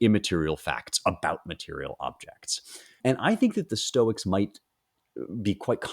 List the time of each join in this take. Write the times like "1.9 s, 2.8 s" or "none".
3.0 s